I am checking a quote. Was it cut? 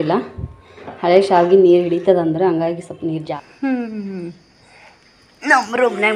yes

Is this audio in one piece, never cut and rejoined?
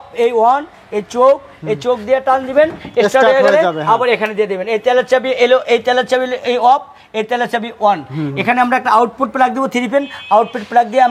yes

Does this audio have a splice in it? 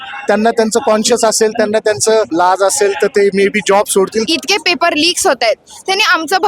yes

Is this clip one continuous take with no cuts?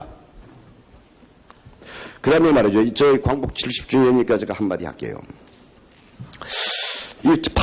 no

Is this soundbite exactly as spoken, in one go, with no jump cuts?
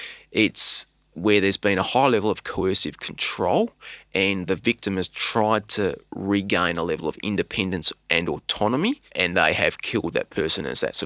no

